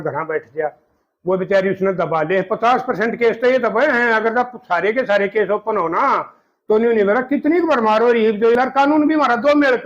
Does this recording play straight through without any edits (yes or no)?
no